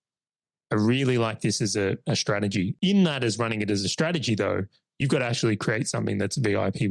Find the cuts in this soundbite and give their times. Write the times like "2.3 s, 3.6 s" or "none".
2.7 s